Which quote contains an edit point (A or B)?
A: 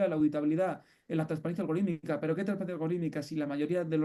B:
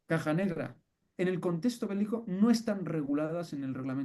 B